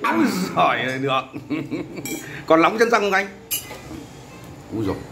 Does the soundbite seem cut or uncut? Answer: cut